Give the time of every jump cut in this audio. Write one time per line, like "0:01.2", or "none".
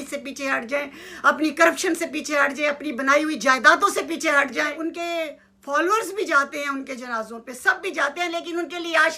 0:04.7